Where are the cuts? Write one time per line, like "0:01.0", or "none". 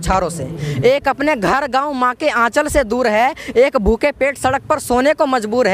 none